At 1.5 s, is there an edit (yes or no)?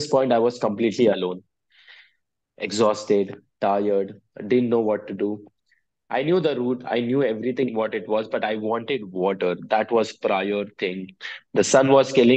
no